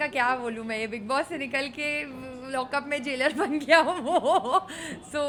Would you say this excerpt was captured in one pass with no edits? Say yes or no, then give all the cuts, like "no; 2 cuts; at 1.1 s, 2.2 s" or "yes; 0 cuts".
yes; 0 cuts